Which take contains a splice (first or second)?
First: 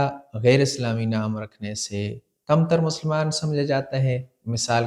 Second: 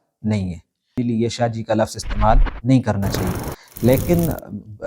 second